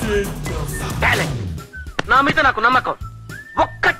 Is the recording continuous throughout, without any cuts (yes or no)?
yes